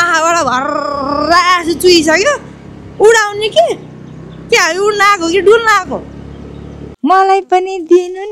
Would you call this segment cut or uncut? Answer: cut